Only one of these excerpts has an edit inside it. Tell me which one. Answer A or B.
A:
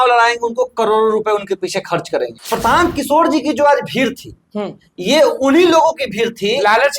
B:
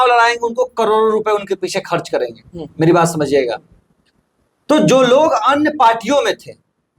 A